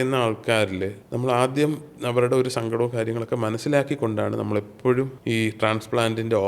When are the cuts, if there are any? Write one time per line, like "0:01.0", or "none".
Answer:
0:01.0
0:05.2

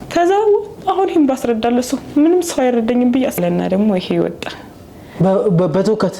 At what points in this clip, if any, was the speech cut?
0:03.4

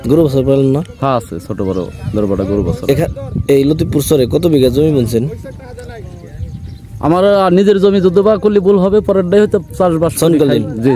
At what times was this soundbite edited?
none

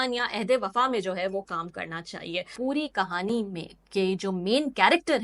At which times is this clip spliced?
0:02.5

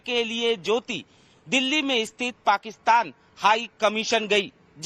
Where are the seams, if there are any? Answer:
0:01.5

